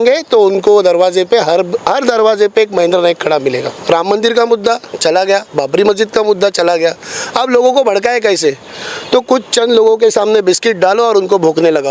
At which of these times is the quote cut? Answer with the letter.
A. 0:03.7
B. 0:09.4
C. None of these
A